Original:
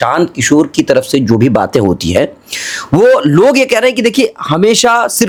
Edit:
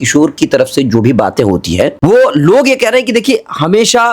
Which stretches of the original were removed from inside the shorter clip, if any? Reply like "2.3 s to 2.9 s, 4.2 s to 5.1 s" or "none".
2.3 s to 2.8 s